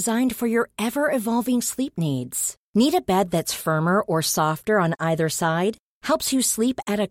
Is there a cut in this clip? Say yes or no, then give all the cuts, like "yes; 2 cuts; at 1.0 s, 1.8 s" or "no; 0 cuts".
no; 0 cuts